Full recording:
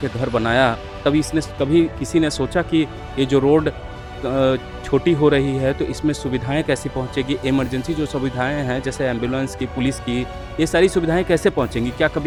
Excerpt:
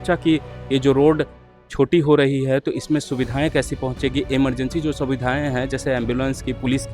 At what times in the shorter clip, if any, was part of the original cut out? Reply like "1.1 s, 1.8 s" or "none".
1.6 s